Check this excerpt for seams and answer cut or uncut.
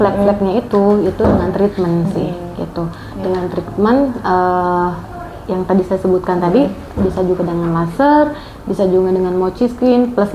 uncut